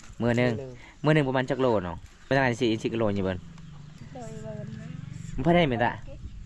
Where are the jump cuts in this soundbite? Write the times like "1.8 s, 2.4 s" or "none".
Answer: 2.1 s, 3.9 s